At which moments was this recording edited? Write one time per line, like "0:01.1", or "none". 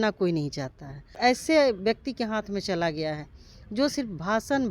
0:01.1